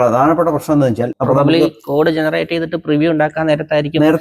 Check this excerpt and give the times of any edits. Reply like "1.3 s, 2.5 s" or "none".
1.1 s